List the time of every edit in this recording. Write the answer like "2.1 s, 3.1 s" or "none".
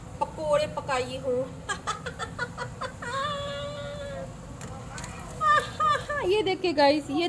3.1 s